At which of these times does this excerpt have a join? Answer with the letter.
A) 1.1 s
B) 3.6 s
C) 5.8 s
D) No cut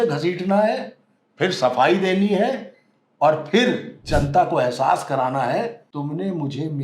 C